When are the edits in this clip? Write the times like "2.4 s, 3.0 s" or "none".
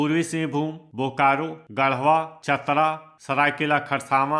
none